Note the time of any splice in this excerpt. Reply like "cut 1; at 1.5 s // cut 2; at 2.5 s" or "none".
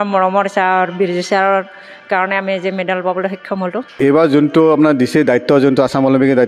cut 1; at 4.0 s